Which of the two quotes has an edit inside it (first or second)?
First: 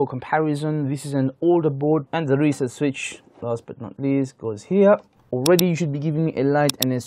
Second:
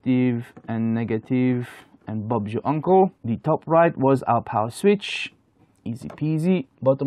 first